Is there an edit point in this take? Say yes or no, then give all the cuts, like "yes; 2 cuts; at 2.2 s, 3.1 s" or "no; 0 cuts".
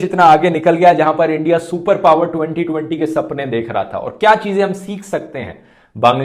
no; 0 cuts